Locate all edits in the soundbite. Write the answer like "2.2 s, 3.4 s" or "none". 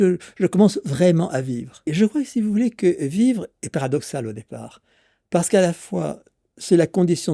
1.9 s